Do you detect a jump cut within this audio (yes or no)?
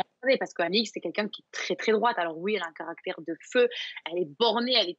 no